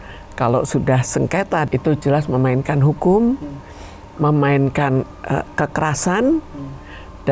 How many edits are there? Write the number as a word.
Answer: one